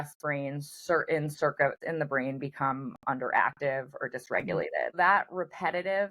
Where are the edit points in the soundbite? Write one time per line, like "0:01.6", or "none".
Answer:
0:01.8
0:04.9

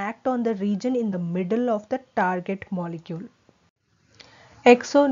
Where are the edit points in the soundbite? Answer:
0:02.6

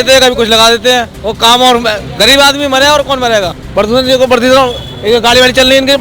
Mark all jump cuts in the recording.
0:01.2
0:03.6

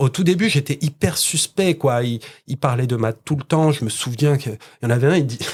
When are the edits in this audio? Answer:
none

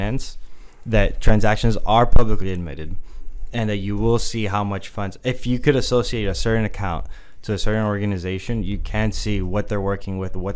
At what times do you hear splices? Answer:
none

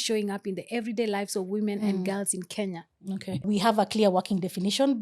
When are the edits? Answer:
0:03.4

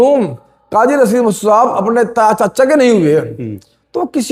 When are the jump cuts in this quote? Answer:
none

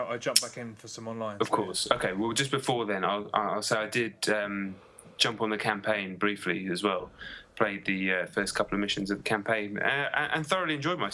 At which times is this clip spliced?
0:03.3

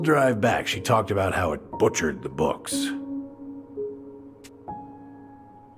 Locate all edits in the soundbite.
0:02.8

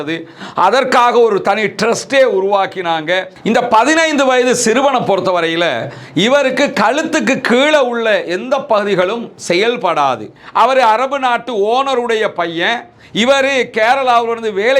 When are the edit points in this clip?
0:03.3
0:10.4

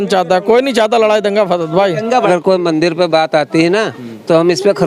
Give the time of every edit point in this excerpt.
0:02.3

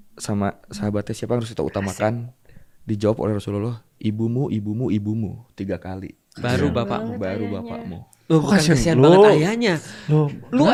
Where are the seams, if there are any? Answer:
none

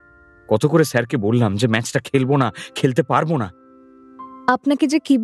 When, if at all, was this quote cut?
0:04.0

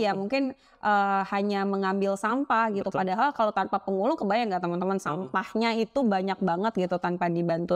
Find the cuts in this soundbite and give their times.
none

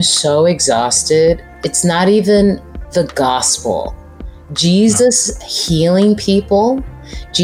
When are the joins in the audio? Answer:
0:01.5
0:02.7

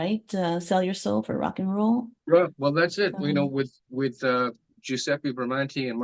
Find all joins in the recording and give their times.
none

